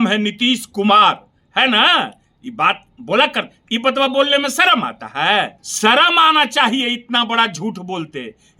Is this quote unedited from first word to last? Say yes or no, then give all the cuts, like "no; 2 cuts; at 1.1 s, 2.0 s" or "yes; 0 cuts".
no; 1 cut; at 5.6 s